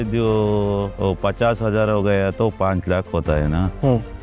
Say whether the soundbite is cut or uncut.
cut